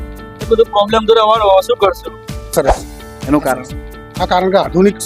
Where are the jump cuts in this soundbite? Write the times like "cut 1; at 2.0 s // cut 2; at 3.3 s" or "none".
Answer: cut 1; at 2.5 s